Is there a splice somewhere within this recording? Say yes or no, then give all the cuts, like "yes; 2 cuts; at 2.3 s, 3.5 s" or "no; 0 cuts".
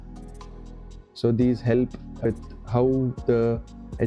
yes; 1 cut; at 2.3 s